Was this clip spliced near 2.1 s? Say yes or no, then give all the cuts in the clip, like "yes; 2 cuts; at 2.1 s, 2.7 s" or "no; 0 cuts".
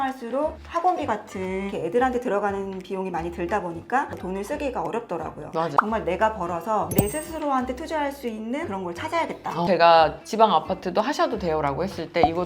no; 3 cuts; at 4.1 s, 5.7 s, 9.7 s